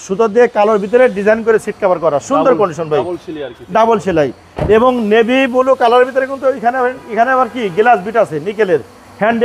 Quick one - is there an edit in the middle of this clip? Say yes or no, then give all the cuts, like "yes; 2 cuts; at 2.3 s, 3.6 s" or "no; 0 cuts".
no; 0 cuts